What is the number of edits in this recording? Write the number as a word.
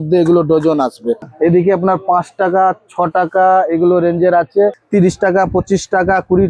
two